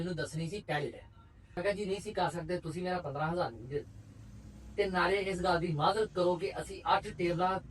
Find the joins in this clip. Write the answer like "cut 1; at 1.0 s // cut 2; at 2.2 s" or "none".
cut 1; at 1.6 s